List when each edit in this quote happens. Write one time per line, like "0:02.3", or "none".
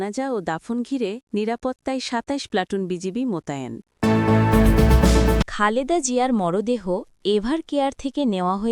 0:03.9
0:05.5